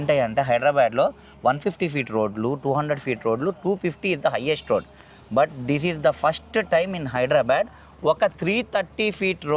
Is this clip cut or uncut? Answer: uncut